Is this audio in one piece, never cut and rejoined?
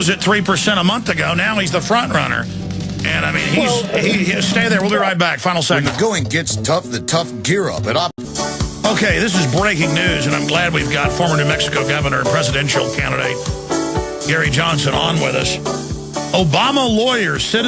no; 1 cut; at 15.9 s

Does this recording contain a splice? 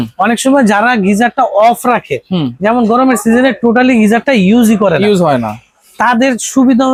no; 0 cuts

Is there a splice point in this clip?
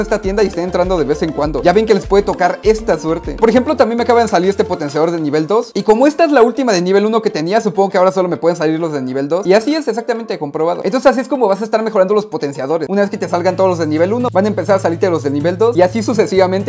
no; 0 cuts

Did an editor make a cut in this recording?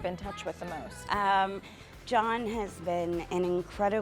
yes; 1 cut; at 1.0 s

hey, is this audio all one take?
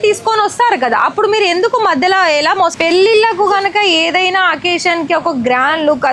no; 1 cut; at 2.7 s

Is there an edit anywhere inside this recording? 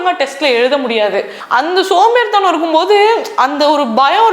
yes; 1 cut; at 1.4 s

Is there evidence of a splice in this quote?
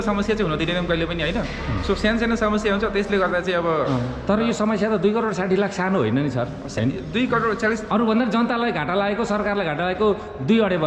no; 0 cuts

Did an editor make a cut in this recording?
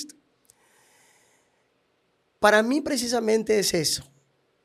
no; 0 cuts

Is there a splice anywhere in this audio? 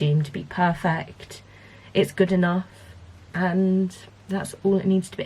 no; 0 cuts

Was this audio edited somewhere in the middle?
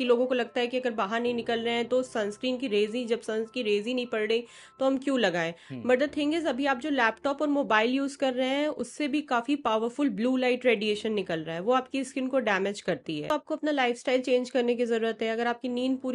yes; 1 cut; at 13.3 s

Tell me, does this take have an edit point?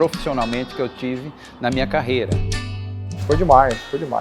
yes; 1 cut; at 2.8 s

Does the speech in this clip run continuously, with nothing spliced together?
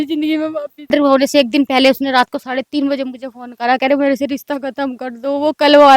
no; 1 cut; at 0.9 s

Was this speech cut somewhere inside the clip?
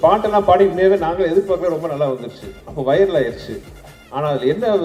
no; 0 cuts

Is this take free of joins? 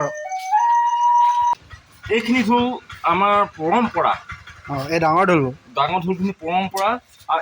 no; 1 cut; at 1.7 s

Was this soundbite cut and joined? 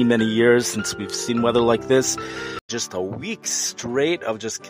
yes; 1 cut; at 2.7 s

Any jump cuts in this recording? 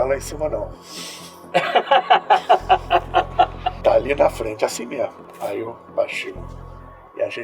yes; 2 cuts; at 3.7 s, 5.2 s

